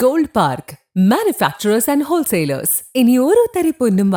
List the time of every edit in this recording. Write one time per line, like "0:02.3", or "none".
none